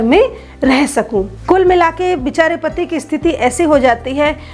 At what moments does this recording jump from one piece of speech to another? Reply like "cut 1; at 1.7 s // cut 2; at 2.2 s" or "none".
cut 1; at 1.3 s